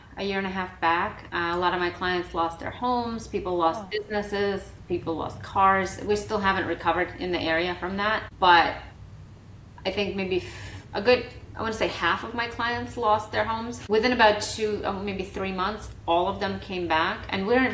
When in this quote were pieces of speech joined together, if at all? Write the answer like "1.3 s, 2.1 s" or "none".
8.3 s, 13.8 s